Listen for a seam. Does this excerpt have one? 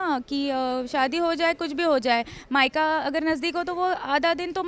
no; 0 cuts

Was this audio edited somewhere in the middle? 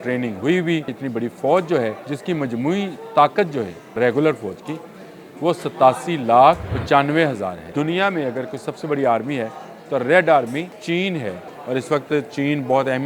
yes; 7 cuts; at 1.0 s, 2.1 s, 3.9 s, 6.7 s, 7.6 s, 10.8 s, 11.5 s

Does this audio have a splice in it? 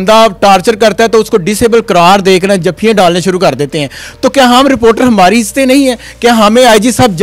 no; 0 cuts

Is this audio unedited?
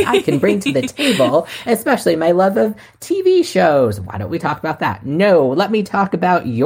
yes; 0 cuts

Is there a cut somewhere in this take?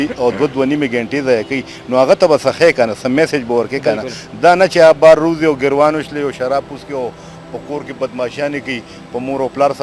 no; 0 cuts

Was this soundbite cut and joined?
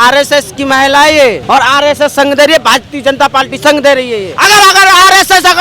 yes; 2 cuts; at 1.4 s, 4.3 s

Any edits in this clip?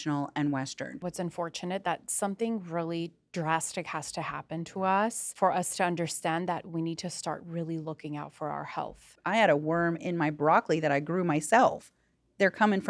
yes; 3 cuts; at 1.1 s, 5.2 s, 9.1 s

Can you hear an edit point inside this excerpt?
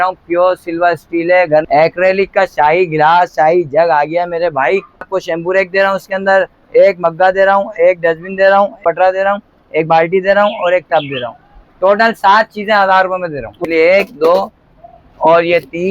yes; 4 cuts; at 1.7 s, 5.1 s, 8.8 s, 13.6 s

